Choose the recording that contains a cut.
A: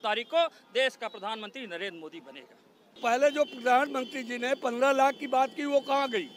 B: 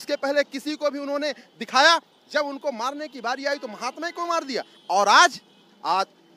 A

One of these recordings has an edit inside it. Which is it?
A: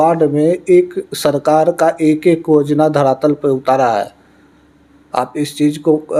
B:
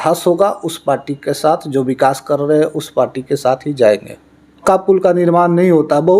B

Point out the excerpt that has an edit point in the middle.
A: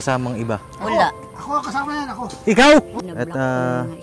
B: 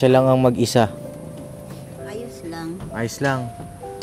A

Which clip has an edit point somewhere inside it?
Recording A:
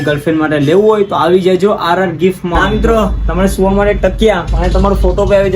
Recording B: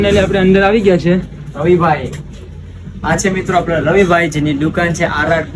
A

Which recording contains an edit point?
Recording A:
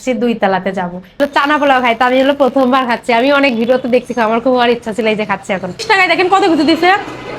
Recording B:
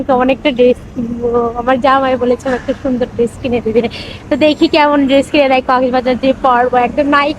A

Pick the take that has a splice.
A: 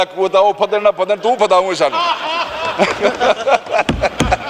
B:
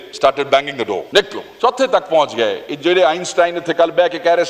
B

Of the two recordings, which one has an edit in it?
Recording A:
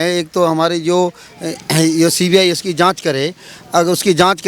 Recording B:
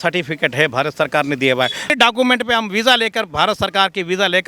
B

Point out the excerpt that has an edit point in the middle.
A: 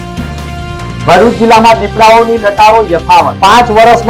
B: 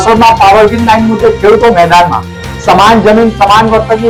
A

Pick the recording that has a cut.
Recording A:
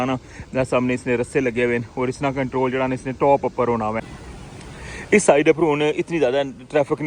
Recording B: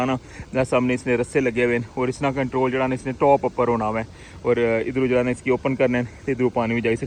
A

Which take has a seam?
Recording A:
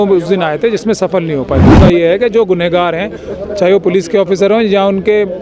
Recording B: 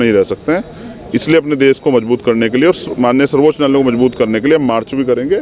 A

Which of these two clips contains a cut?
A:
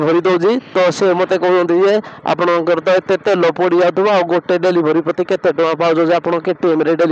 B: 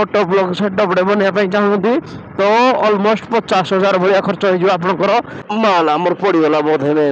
B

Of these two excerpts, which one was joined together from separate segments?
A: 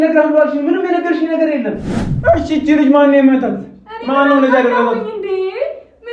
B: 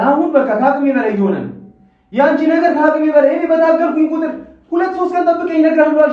A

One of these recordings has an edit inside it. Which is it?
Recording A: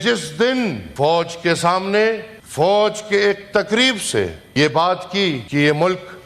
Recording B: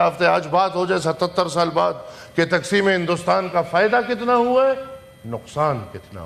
A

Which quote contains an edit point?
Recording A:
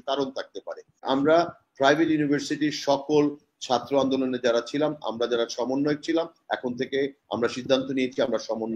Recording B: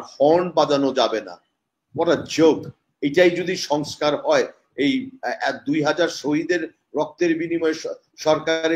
A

